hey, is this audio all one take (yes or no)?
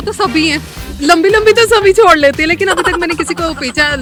yes